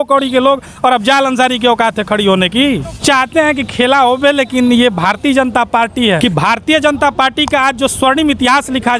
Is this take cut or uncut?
cut